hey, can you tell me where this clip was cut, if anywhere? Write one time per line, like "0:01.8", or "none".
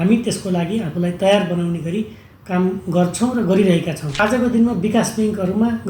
0:04.0

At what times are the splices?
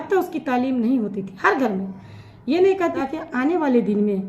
0:02.9

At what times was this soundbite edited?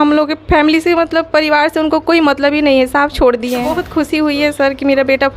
0:03.6

